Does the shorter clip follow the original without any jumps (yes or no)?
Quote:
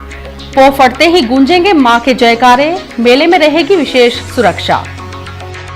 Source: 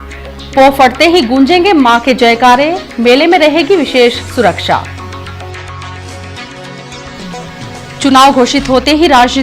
yes